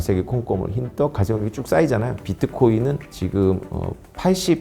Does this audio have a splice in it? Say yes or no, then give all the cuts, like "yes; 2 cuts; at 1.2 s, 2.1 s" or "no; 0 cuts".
yes; 1 cut; at 2.2 s